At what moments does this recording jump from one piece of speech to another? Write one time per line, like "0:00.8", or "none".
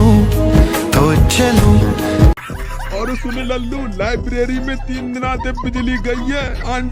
0:02.3